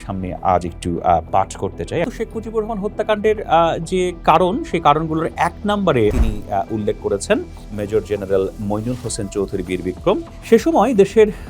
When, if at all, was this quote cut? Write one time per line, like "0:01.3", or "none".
0:02.1
0:06.1
0:10.3